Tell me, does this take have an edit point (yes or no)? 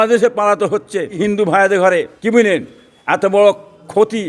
yes